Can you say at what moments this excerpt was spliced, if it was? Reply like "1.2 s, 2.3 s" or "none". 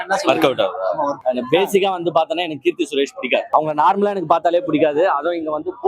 1.2 s, 3.5 s